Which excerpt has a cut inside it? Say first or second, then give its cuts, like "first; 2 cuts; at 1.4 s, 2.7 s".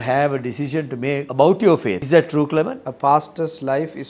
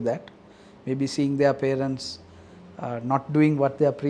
first; 3 cuts; at 1.3 s, 2.0 s, 2.8 s